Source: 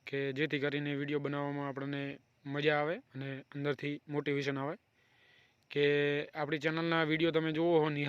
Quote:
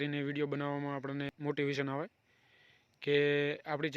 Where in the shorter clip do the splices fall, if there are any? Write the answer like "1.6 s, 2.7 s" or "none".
1.3 s